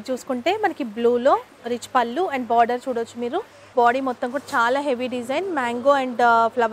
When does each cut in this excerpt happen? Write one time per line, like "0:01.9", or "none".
0:03.7